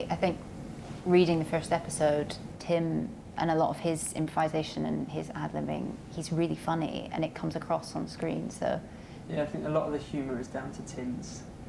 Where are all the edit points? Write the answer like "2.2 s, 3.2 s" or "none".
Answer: 2.5 s, 9.1 s